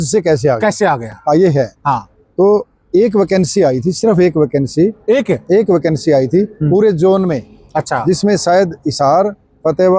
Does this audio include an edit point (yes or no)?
no